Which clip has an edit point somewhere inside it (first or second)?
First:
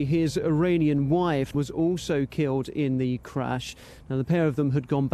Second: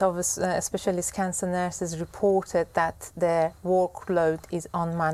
first